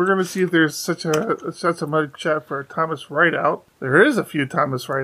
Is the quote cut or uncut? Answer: cut